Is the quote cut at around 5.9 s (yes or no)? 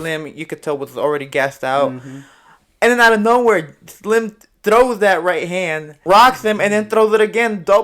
yes